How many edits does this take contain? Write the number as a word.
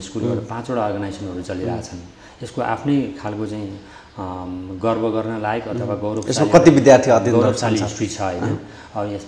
zero